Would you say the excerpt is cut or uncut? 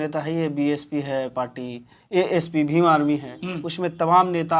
uncut